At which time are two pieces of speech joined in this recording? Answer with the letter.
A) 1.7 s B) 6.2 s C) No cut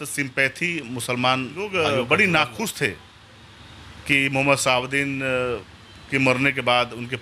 A